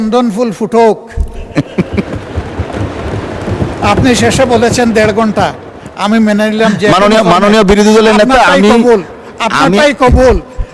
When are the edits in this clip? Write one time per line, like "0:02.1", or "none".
none